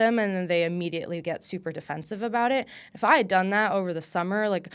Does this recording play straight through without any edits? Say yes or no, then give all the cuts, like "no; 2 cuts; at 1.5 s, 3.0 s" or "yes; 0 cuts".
yes; 0 cuts